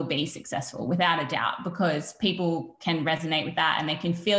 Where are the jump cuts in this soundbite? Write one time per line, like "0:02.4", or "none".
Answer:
none